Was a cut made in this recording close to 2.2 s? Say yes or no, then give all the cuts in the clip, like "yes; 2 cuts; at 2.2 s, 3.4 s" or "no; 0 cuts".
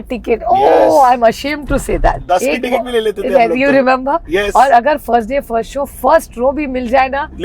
yes; 1 cut; at 2.2 s